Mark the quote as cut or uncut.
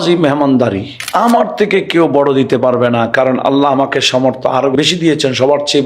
cut